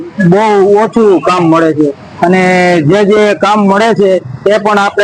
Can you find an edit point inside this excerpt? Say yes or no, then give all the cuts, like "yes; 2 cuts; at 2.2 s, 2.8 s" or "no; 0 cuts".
no; 0 cuts